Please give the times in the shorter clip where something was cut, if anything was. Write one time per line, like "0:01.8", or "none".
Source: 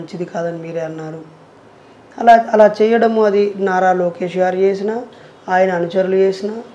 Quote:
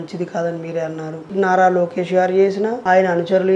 0:01.3
0:02.8